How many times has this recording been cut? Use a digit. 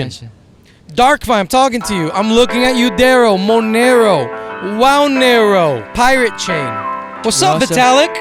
2